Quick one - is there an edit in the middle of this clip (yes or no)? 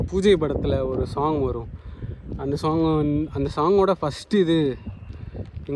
no